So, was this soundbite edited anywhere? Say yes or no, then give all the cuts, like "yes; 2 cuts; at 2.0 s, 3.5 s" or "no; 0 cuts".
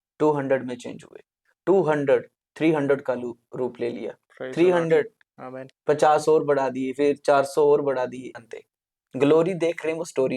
yes; 1 cut; at 8.3 s